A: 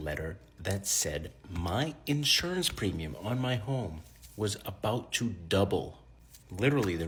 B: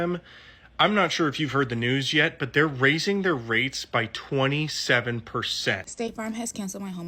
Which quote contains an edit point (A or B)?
B